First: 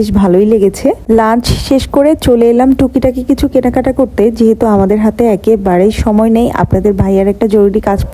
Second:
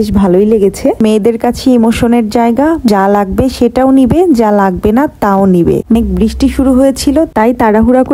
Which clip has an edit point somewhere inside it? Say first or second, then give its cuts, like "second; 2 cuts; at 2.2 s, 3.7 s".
second; 3 cuts; at 1.0 s, 2.9 s, 5.9 s